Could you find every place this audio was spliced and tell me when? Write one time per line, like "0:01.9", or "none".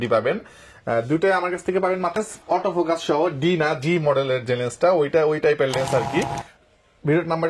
0:02.2
0:06.4